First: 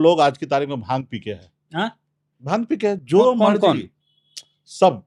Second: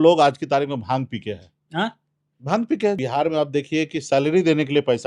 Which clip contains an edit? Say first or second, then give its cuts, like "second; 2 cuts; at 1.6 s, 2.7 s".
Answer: second; 1 cut; at 3.0 s